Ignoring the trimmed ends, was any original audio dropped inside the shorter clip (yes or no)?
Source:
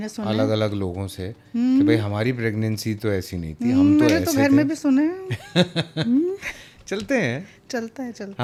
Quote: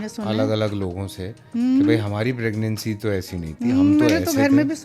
no